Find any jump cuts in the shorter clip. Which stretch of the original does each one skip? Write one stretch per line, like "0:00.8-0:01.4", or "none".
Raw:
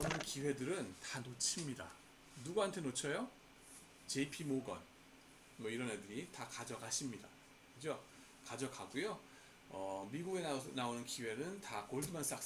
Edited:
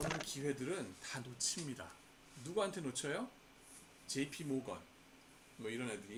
none